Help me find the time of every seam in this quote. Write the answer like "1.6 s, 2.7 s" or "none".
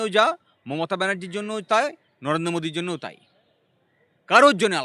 none